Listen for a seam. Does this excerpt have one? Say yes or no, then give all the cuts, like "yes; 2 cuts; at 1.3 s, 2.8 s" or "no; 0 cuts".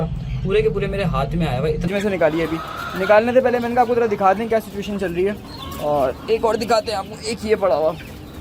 yes; 1 cut; at 1.9 s